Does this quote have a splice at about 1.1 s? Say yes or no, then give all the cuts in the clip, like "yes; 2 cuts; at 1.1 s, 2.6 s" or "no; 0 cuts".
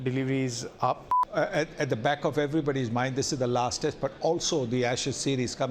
yes; 1 cut; at 1.1 s